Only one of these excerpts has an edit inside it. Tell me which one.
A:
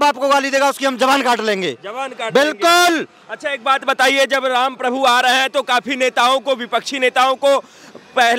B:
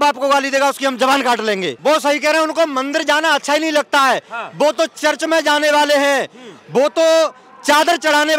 B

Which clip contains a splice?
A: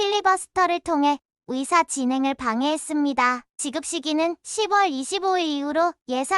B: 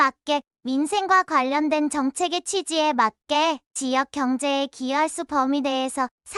A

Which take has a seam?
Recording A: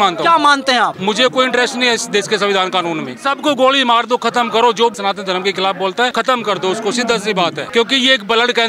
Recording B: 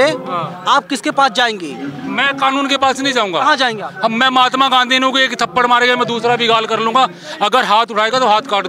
A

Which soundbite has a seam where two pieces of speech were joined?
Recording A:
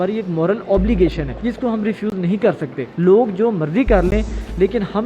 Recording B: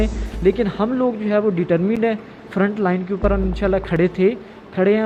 A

